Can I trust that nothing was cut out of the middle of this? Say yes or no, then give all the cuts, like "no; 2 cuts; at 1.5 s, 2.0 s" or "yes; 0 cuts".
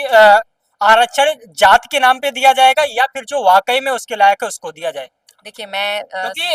yes; 0 cuts